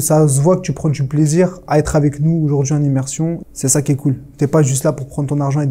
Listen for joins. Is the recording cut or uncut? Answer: cut